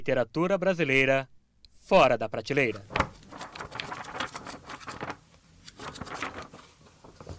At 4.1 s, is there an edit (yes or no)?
no